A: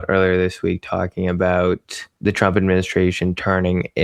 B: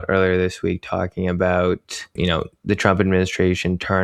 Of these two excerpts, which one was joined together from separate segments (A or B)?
A